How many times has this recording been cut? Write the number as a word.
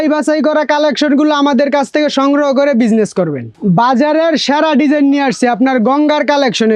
one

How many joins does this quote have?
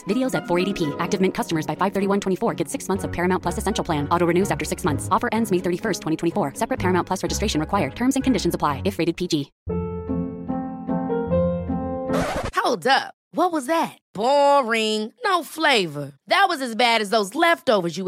one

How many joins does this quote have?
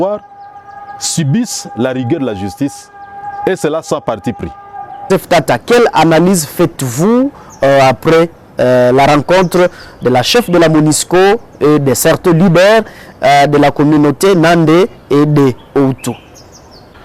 one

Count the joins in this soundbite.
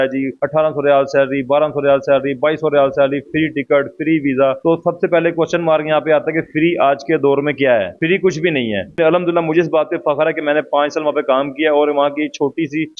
one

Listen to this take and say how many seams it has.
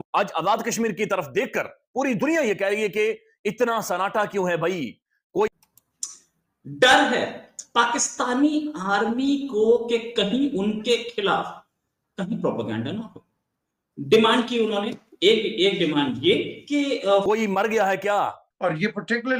two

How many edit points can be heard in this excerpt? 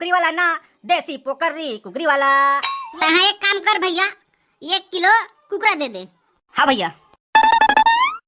one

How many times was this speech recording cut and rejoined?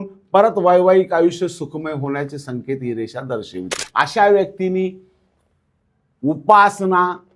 one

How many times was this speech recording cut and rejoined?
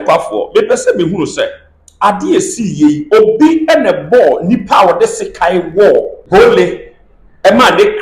one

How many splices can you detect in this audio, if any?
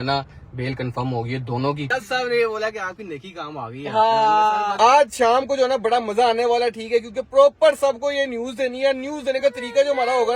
two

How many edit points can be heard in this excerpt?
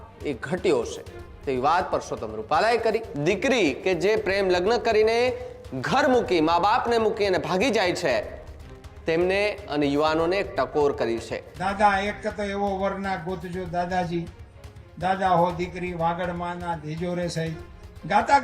two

